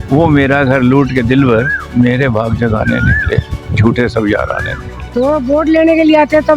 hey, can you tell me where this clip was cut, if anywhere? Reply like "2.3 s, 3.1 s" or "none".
5.0 s